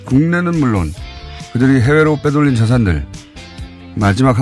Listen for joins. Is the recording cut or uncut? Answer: cut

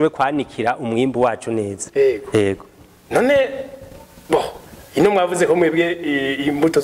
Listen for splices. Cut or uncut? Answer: uncut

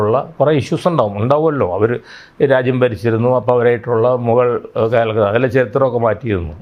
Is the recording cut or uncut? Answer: uncut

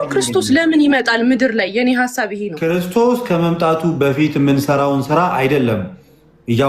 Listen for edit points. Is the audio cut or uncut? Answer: cut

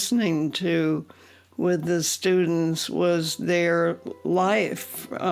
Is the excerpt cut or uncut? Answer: uncut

